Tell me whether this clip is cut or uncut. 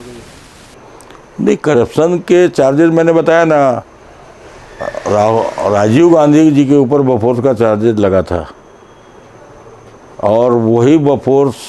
uncut